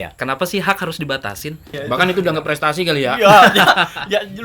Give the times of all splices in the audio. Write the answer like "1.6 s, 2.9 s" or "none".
1.7 s